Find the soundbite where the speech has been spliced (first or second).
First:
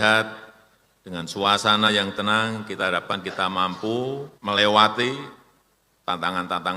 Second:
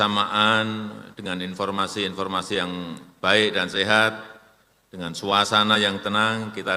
first